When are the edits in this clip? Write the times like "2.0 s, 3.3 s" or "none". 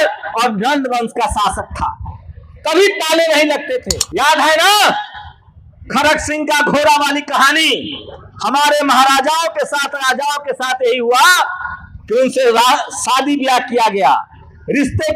4.0 s